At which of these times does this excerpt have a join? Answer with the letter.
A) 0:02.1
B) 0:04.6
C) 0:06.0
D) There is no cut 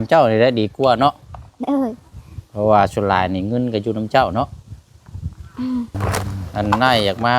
C